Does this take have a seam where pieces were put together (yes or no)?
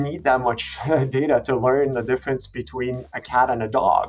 no